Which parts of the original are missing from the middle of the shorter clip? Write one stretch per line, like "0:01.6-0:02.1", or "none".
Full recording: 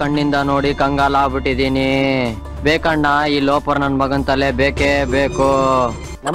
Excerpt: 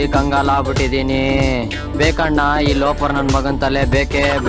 none